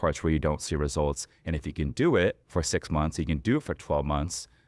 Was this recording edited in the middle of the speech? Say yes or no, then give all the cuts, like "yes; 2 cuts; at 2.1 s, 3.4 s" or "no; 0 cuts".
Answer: yes; 1 cut; at 2.4 s